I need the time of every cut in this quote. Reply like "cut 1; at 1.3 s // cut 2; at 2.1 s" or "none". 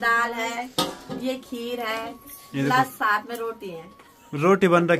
none